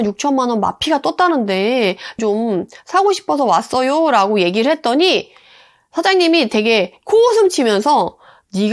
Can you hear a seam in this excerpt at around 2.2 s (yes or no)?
yes